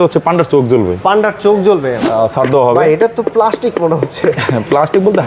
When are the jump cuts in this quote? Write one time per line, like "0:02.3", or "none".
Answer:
0:02.0